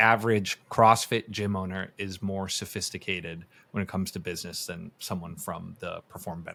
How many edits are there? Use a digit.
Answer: 0